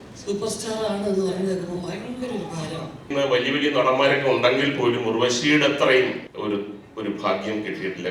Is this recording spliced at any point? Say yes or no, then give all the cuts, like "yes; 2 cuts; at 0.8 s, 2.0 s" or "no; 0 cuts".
yes; 2 cuts; at 3.1 s, 6.3 s